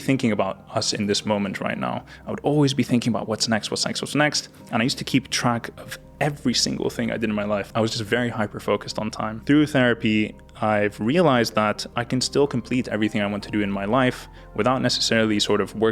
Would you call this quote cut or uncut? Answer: cut